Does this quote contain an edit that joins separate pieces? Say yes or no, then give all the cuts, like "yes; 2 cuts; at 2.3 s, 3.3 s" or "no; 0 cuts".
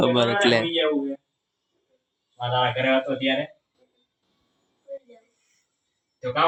no; 0 cuts